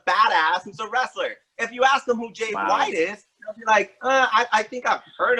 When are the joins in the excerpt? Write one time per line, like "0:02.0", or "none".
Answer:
none